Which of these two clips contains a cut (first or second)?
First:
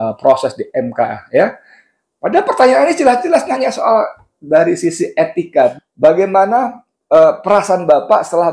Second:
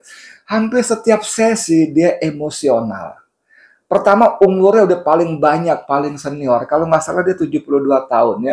first